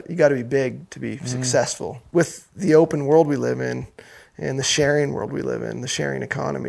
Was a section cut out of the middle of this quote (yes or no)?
yes